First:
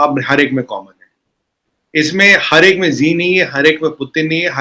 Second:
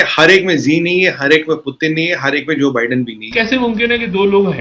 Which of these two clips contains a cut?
second; 1 cut; at 3.2 s

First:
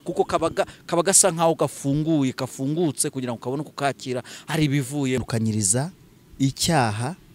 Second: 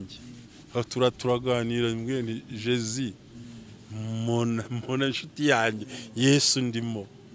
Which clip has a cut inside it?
first; 1 cut; at 5.2 s

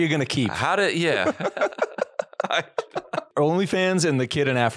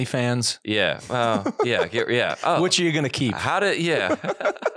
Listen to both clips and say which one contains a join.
first; 1 cut; at 3.3 s

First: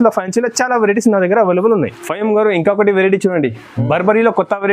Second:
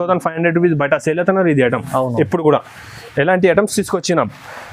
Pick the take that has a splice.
first; 1 cut; at 2.0 s

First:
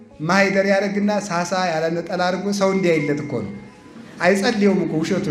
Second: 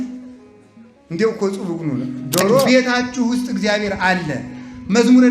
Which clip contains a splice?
second; 1 cut; at 2.7 s

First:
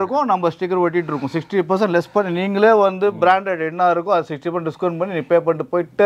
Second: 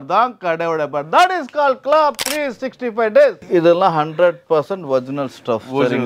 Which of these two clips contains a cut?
second; 1 cut; at 3.4 s

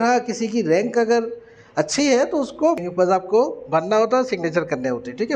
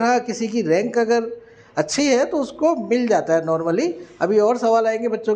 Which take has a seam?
first; 1 cut; at 2.8 s

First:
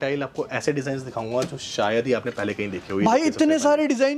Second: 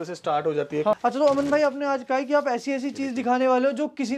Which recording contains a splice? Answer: second; 1 cut; at 0.9 s

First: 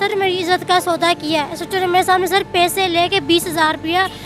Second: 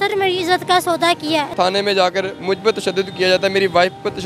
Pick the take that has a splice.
second; 1 cut; at 1.5 s

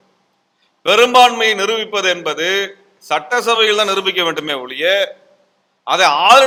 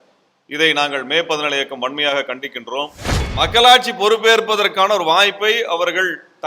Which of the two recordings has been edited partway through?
second; 1 cut; at 3.2 s

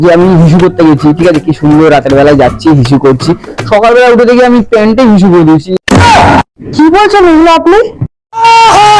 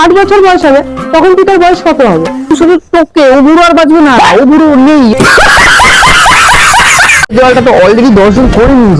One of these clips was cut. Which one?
second; 1 cut; at 7.3 s

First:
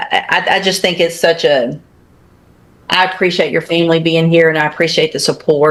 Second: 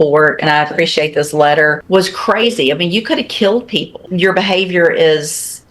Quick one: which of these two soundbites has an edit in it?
second; 2 cuts; at 1.8 s, 4.0 s

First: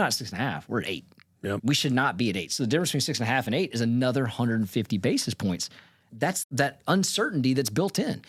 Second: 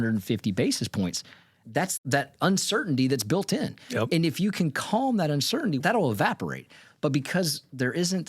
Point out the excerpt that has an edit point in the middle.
second; 1 cut; at 5.8 s

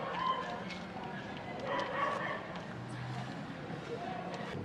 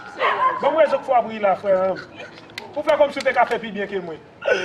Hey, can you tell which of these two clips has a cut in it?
second; 1 cut; at 1.5 s

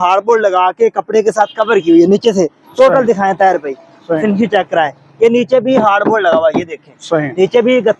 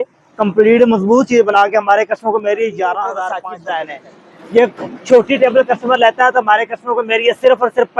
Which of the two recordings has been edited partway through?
second; 1 cut; at 3.4 s

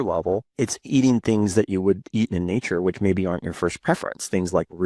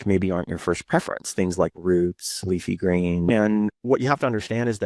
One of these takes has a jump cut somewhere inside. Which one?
second; 1 cut; at 3.3 s

